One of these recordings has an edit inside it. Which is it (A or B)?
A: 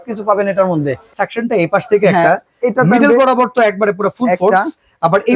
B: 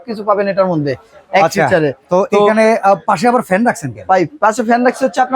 A